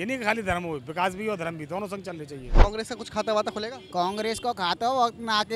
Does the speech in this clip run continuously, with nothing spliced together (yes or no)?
no